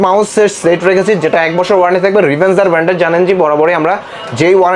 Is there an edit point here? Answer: no; 0 cuts

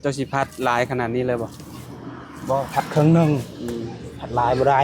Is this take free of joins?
yes; 0 cuts

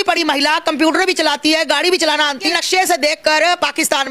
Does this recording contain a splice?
yes; 1 cut; at 2.6 s

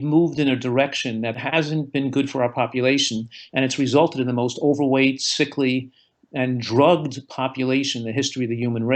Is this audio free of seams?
no; 1 cut; at 1.4 s

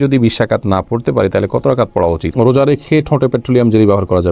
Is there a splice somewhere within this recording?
yes; 1 cut; at 2.3 s

